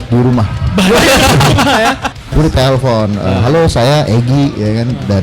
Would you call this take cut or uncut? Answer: cut